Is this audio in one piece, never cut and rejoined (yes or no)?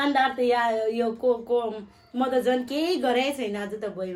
yes